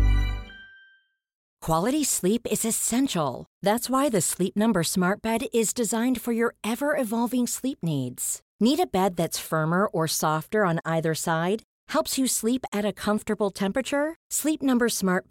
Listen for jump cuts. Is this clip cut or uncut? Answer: cut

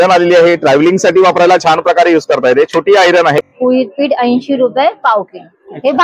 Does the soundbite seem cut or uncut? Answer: cut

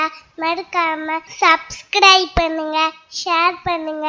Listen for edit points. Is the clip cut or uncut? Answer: cut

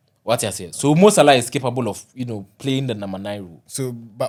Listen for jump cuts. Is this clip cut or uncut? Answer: uncut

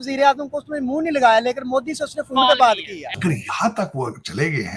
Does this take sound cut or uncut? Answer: cut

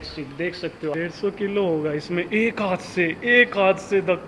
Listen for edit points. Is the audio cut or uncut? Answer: cut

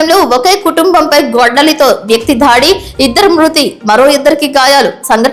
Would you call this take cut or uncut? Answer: uncut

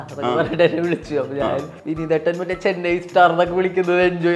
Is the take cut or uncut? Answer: cut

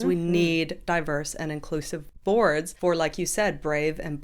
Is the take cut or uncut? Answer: cut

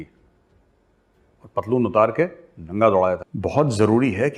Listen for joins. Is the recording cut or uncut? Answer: cut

